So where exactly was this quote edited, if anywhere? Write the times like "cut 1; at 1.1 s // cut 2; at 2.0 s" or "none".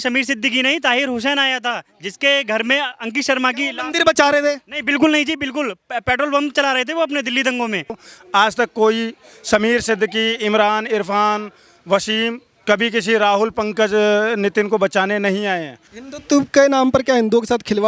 cut 1; at 8.1 s // cut 2; at 15.9 s

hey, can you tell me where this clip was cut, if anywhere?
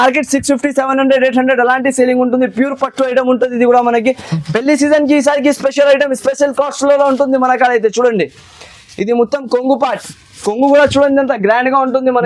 none

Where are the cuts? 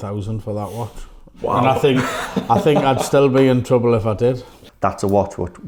cut 1; at 4.6 s

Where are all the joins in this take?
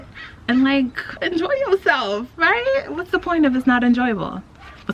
none

